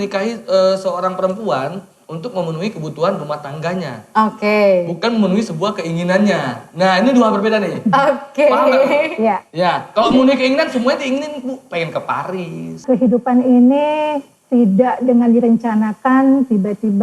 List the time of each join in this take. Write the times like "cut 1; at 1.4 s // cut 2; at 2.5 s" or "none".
cut 1; at 12.8 s